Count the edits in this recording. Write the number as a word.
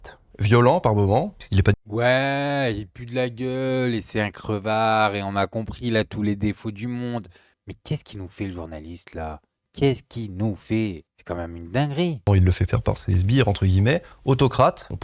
zero